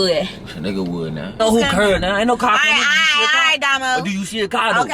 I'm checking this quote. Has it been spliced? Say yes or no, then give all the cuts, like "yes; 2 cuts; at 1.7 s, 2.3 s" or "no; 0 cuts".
yes; 1 cut; at 1.4 s